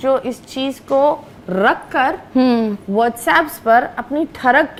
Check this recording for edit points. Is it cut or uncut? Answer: uncut